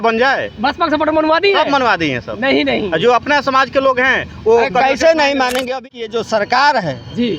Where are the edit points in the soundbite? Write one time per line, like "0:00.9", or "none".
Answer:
0:05.7